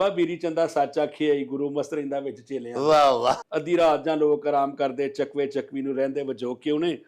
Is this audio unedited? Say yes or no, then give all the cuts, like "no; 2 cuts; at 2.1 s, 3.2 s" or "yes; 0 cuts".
no; 1 cut; at 3.4 s